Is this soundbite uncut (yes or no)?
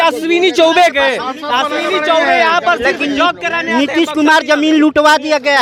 yes